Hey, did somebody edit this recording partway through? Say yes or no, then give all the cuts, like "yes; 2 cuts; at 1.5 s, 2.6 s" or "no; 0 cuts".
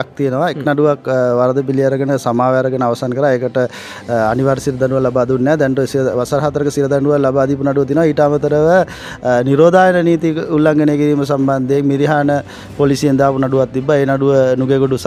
no; 0 cuts